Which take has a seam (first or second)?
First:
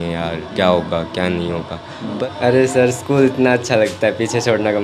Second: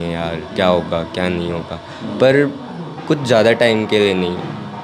first